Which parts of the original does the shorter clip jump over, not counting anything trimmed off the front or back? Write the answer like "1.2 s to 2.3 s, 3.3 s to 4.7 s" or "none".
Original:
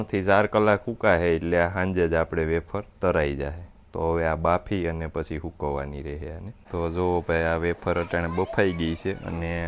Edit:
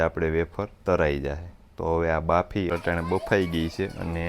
4.8 s to 8.0 s